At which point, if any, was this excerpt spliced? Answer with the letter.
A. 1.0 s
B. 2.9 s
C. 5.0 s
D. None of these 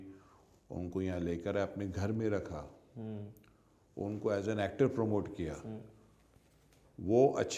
D